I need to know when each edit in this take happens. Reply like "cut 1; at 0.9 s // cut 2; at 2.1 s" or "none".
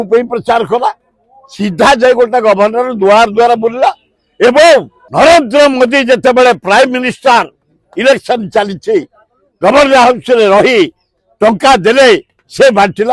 cut 1; at 5.0 s